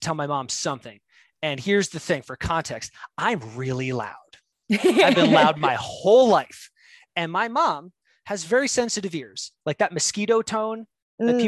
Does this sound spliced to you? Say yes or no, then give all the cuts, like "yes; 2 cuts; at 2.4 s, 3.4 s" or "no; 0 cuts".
no; 0 cuts